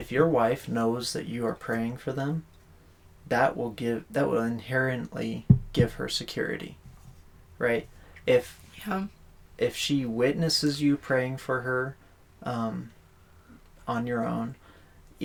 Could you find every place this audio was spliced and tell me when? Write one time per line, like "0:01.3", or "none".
none